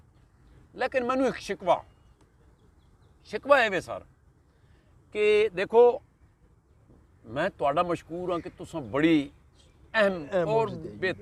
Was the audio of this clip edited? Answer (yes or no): no